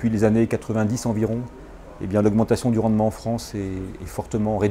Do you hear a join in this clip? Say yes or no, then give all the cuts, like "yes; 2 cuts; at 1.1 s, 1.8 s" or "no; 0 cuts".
no; 0 cuts